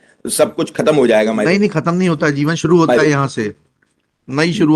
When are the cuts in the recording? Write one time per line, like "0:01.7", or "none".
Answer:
none